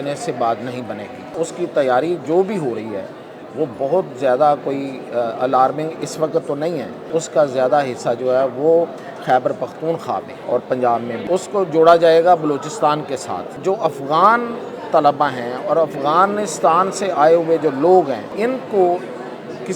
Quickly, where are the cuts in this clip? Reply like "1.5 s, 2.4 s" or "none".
1.4 s, 7.1 s, 10.3 s, 11.2 s, 13.5 s, 18.3 s